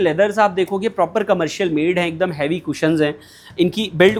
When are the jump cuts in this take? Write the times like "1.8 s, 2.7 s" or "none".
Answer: none

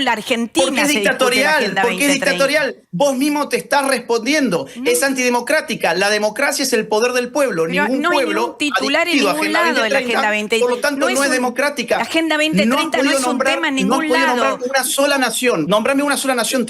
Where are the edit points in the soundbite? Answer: 15.7 s

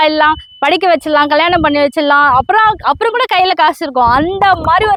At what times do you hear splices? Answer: none

